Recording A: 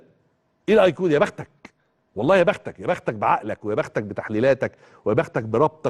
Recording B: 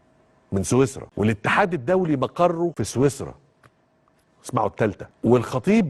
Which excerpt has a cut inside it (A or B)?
B